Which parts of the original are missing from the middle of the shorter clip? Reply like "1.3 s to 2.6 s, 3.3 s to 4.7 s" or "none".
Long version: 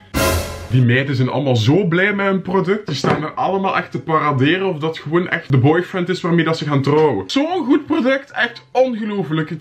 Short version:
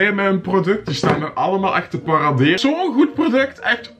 4.6 s to 7.3 s